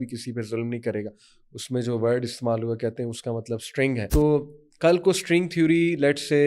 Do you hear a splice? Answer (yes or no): yes